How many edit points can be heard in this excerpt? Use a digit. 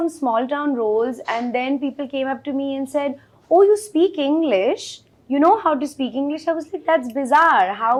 0